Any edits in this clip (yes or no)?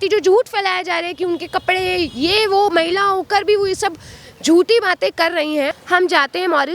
yes